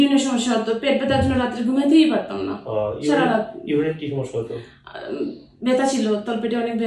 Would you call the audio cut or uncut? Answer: uncut